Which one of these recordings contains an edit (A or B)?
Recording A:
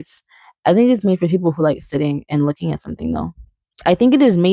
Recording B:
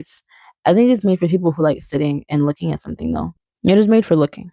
B